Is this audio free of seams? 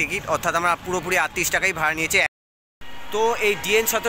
no; 1 cut; at 2.3 s

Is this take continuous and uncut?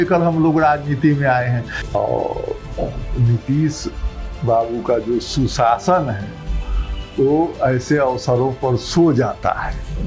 no; 1 cut; at 1.8 s

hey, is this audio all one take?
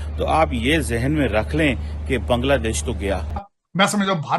no; 1 cut; at 3.3 s

